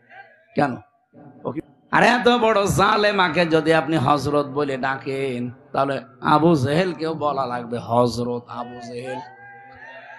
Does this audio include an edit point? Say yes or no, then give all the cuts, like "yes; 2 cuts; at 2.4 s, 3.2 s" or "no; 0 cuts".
yes; 1 cut; at 1.5 s